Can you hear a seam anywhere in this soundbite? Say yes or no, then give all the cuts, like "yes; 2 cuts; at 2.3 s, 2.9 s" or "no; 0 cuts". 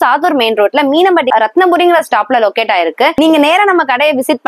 yes; 2 cuts; at 1.3 s, 3.1 s